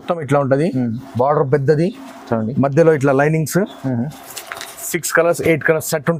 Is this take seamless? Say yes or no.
yes